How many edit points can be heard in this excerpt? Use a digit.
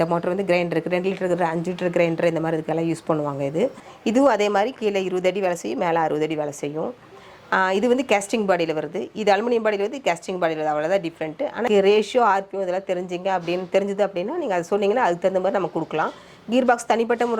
2